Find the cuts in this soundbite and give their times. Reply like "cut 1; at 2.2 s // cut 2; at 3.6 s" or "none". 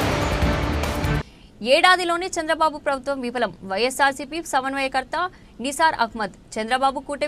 cut 1; at 1.1 s